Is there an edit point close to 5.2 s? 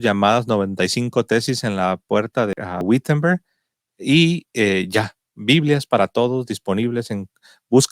no; 1 cut; at 2.7 s

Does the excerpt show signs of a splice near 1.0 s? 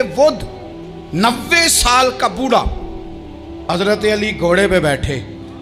no; 1 cut; at 3.7 s

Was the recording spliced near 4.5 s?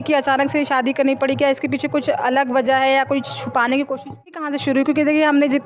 yes; 1 cut; at 4.5 s

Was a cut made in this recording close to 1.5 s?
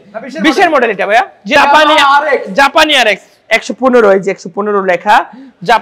yes; 1 cut; at 1.5 s

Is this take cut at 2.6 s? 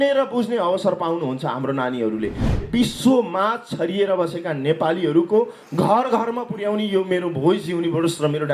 yes; 1 cut; at 2.6 s

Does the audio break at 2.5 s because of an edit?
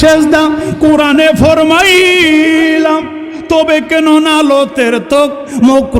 no; 0 cuts

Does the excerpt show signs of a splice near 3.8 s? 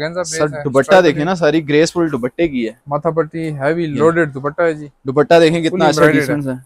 no; 0 cuts

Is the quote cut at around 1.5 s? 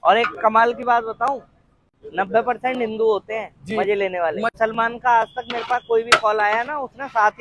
no; 1 cut; at 4.5 s

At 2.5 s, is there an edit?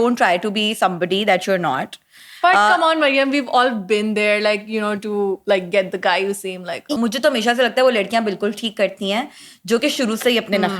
no; 1 cut; at 6.8 s

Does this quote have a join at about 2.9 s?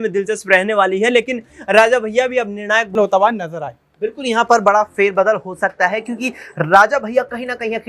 yes; 1 cut; at 2.9 s

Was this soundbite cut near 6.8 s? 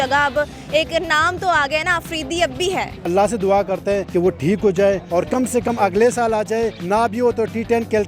yes; 4 cuts; at 3.0 s, 4.1 s, 5.0 s, 6.8 s

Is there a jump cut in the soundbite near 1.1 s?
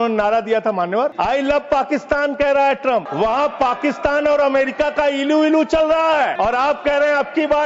yes; 3 cuts; at 1.1 s, 3.1 s, 6.3 s

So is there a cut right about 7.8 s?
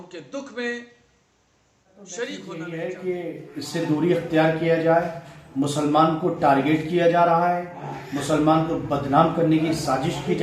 no; 1 cut; at 2.5 s

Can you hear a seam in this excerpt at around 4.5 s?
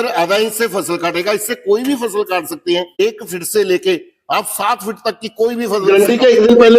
no; 2 cuts; at 3.0 s, 5.8 s

